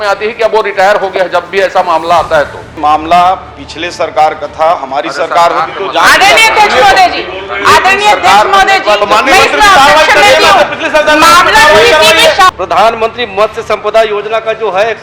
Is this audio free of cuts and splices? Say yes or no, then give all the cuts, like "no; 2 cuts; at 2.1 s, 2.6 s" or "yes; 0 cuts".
no; 2 cuts; at 2.8 s, 12.5 s